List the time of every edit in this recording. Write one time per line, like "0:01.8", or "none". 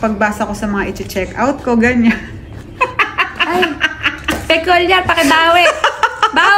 none